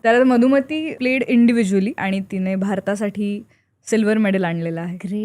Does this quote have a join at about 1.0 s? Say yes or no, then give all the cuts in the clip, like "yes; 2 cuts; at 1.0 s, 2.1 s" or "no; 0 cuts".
yes; 2 cuts; at 1.0 s, 2.0 s